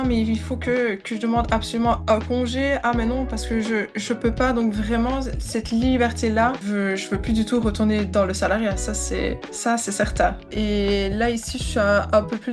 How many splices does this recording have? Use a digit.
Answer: 2